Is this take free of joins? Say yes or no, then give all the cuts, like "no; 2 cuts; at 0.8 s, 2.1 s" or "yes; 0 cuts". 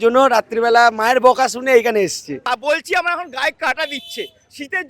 no; 1 cut; at 2.5 s